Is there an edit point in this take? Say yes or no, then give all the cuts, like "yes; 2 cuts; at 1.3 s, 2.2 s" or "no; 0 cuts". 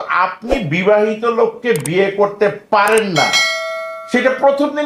no; 0 cuts